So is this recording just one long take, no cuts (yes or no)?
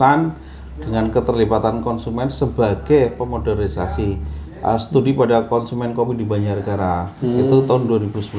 yes